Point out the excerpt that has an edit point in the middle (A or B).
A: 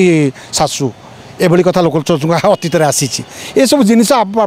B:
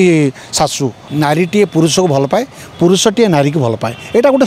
B